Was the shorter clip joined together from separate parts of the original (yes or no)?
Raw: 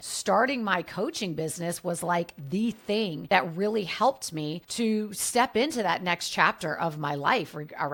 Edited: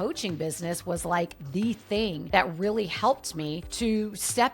no